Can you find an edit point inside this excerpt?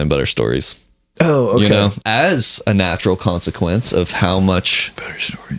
yes; 1 cut; at 2.0 s

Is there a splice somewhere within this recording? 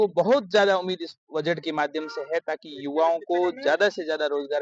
no; 0 cuts

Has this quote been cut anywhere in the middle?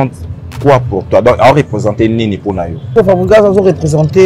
yes; 1 cut; at 2.9 s

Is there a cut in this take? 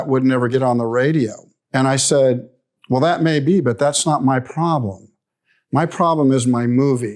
no; 0 cuts

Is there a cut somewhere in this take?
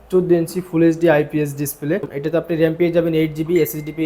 yes; 1 cut; at 2.1 s

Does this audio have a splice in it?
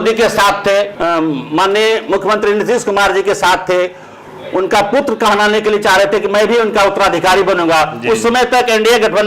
yes; 1 cut; at 0.9 s

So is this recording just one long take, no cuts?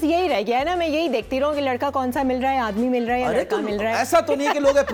yes; 0 cuts

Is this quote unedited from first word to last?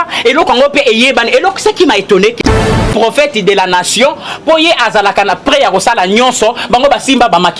no; 1 cut; at 2.5 s

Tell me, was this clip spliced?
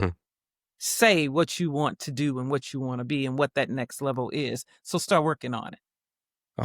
no; 0 cuts

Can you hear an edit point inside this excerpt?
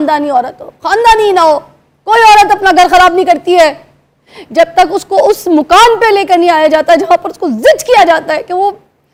no; 0 cuts

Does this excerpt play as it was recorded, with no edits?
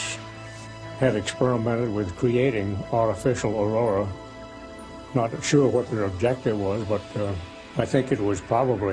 yes; 0 cuts

